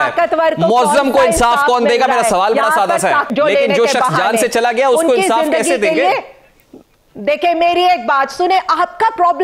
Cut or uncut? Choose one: cut